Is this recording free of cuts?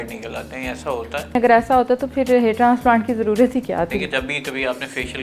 no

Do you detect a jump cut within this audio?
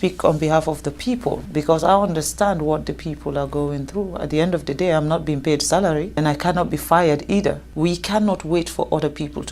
yes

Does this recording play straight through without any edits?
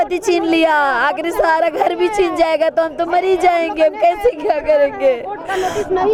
yes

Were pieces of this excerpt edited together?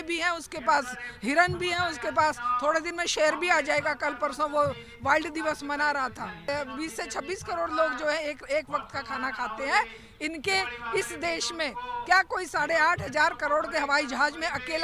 yes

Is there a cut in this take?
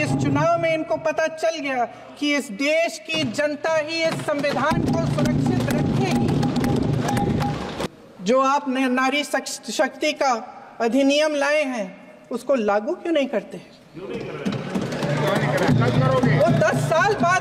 yes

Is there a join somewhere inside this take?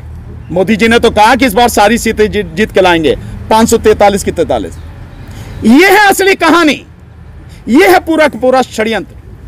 no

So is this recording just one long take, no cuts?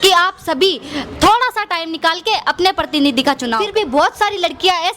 no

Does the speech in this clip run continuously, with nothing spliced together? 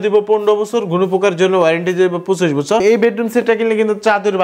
no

